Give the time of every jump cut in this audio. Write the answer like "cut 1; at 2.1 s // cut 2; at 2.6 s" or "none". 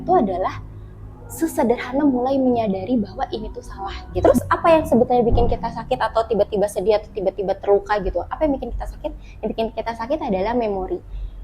cut 1; at 4.0 s

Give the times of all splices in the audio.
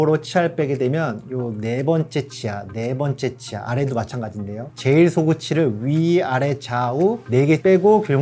none

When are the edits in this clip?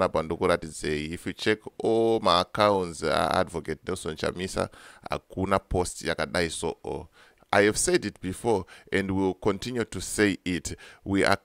cut 1; at 7.4 s

